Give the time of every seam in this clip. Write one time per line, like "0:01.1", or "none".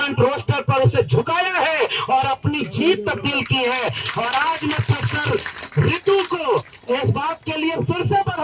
none